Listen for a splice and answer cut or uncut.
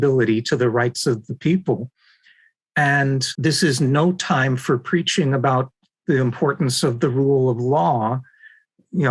cut